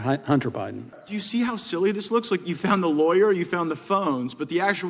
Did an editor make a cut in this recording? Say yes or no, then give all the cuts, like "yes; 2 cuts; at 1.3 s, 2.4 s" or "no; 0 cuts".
yes; 1 cut; at 1.0 s